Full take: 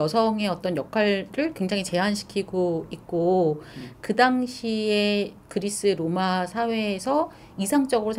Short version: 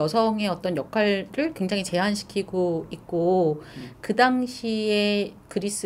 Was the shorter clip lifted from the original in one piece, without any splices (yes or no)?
yes